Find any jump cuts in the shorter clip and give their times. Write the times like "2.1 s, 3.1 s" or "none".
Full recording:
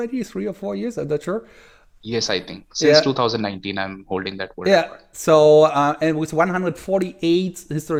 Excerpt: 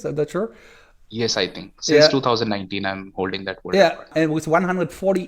4.1 s